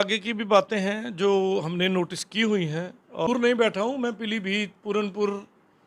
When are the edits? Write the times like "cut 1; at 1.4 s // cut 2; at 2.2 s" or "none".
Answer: cut 1; at 3.3 s